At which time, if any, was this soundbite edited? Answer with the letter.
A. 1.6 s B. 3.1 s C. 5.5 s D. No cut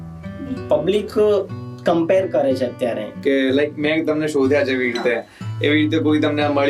B